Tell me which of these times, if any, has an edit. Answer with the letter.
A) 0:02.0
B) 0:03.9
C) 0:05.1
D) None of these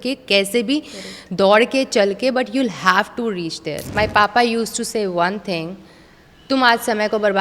B